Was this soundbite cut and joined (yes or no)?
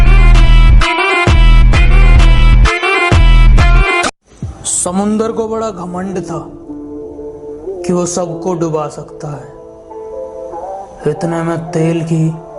yes